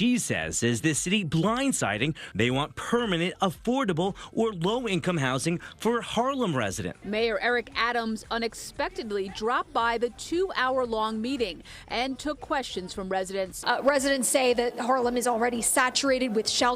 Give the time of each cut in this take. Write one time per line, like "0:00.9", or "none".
0:02.3
0:06.9
0:13.6